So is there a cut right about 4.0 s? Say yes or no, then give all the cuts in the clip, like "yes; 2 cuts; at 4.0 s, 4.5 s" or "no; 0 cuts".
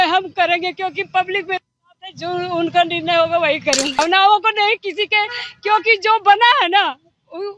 yes; 1 cut; at 4.0 s